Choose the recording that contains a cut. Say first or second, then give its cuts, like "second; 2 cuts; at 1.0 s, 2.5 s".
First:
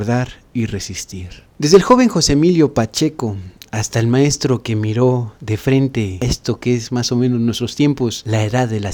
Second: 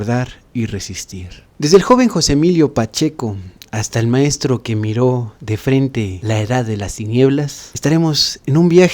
second; 1 cut; at 6.2 s